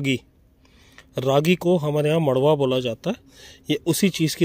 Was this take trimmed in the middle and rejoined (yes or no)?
no